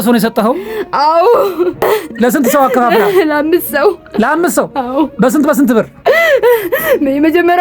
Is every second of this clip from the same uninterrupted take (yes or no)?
no